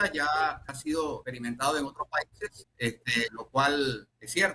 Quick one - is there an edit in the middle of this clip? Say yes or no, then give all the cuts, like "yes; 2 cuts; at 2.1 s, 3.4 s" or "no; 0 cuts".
no; 0 cuts